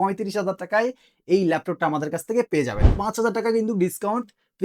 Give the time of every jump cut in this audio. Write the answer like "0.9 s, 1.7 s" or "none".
2.9 s